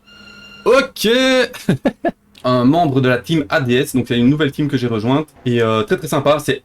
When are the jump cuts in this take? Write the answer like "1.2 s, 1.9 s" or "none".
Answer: 2.3 s